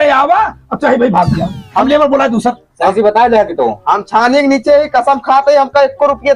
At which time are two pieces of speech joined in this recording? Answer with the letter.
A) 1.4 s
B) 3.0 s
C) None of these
C